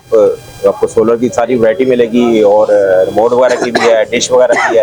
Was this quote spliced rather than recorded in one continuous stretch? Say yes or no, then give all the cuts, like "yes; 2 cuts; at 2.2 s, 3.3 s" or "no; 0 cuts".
no; 0 cuts